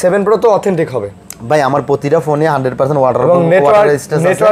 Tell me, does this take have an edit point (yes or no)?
no